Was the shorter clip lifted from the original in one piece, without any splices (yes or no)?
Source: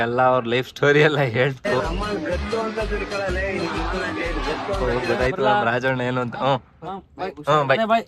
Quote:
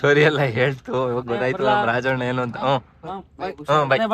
no